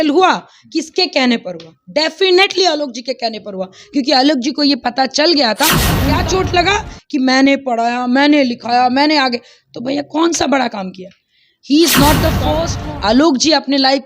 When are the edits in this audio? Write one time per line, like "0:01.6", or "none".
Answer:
0:06.0
0:12.7